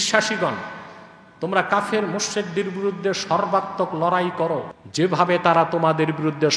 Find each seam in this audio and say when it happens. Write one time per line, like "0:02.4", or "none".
0:04.8

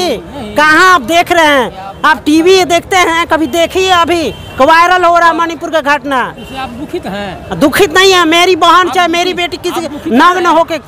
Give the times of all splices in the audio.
none

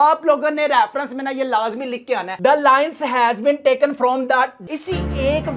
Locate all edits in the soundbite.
0:04.6

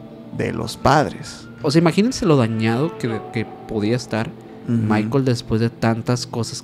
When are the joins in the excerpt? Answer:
0:01.6

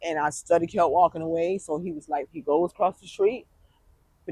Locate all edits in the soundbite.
0:02.3

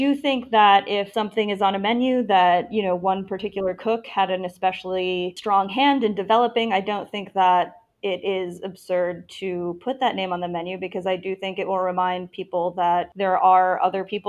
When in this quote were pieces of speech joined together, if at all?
0:01.1
0:05.4
0:13.1

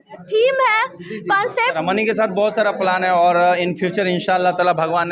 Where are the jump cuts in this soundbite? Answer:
0:01.8

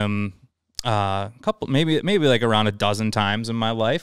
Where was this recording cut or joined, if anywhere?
none

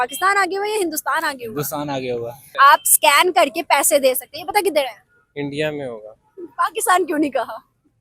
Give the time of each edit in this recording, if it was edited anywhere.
0:02.5

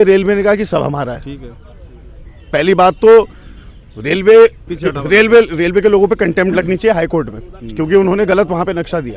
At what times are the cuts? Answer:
none

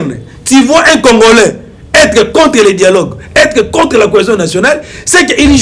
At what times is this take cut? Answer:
none

